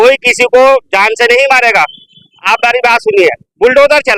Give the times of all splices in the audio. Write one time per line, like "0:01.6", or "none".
none